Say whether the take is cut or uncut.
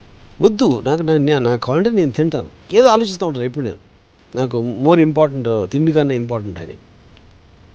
cut